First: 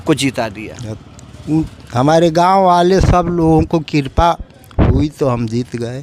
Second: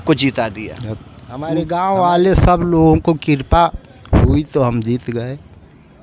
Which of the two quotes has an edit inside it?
second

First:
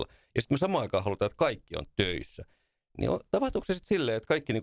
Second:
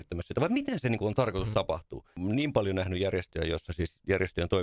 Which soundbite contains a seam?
second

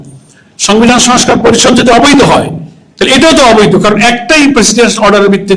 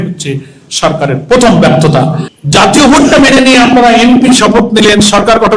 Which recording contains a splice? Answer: second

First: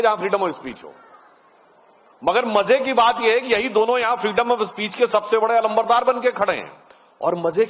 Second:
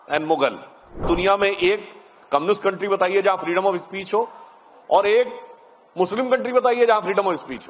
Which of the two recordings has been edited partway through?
second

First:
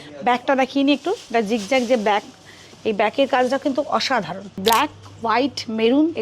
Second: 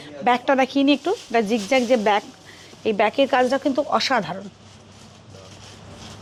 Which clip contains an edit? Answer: first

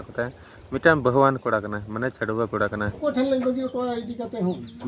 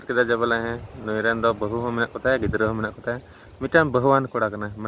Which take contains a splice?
first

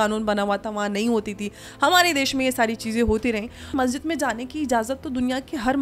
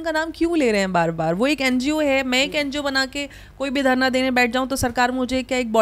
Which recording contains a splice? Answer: first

